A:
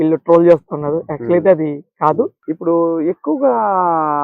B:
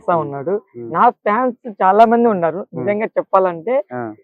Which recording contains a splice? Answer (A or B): A